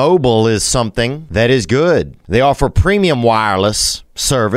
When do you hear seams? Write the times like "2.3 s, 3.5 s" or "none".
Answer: 1.2 s, 2.2 s